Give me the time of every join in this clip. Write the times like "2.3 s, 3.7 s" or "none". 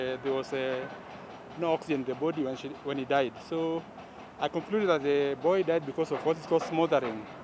3.9 s